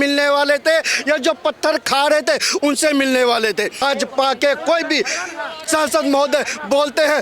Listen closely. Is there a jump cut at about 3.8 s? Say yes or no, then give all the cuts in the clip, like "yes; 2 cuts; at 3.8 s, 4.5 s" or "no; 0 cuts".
yes; 1 cut; at 3.8 s